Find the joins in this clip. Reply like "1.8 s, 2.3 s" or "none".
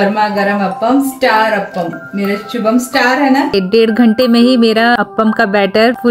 3.5 s